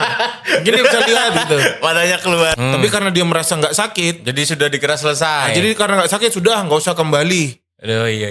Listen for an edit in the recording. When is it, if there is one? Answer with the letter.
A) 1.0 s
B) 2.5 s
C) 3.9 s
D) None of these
B